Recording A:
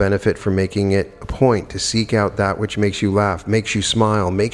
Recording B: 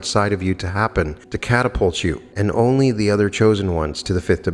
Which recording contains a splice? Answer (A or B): B